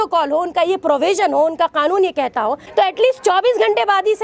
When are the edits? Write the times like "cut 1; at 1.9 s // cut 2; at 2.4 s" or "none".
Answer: cut 1; at 2.6 s